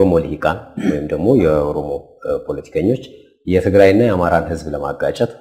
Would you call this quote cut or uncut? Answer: uncut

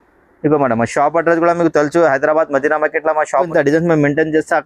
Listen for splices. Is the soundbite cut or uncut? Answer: cut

